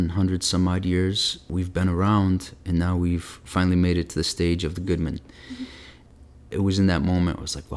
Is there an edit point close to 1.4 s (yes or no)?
yes